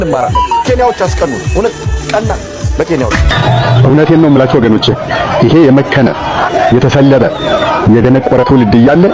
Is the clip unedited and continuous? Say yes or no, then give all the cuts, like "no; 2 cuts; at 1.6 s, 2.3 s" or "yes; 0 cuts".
yes; 0 cuts